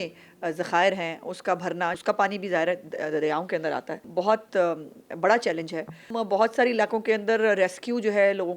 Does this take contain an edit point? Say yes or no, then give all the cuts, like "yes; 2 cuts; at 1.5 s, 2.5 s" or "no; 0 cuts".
yes; 3 cuts; at 2.0 s, 4.0 s, 6.1 s